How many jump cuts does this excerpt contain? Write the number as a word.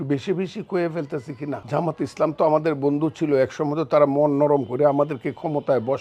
one